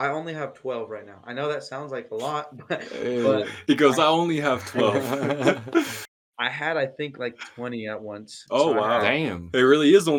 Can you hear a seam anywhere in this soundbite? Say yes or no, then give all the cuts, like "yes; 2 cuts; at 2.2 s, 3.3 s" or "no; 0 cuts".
no; 0 cuts